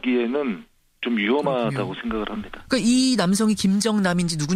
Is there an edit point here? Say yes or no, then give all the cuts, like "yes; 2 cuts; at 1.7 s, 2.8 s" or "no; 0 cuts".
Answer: no; 0 cuts